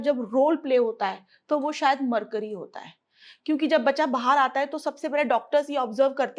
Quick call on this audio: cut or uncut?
uncut